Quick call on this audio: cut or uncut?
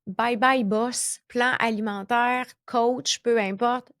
cut